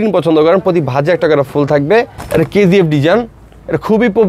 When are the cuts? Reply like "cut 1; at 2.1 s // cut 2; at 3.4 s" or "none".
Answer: cut 1; at 2.2 s